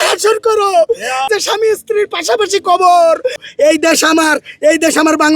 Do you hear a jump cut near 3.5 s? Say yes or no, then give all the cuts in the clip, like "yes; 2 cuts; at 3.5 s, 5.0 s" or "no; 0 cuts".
yes; 2 cuts; at 1.3 s, 3.5 s